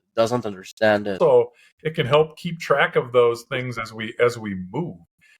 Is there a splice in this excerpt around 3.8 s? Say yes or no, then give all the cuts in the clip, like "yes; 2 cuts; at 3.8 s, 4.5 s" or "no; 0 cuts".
no; 1 cut; at 1.2 s